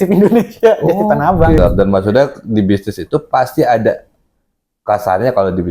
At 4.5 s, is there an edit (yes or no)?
no